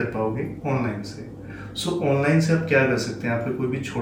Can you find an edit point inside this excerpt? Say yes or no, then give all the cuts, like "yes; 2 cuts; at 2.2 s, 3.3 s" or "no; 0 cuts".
no; 0 cuts